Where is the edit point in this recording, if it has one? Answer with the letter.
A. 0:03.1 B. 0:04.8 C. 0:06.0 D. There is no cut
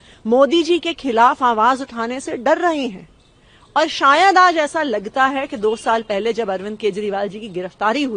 D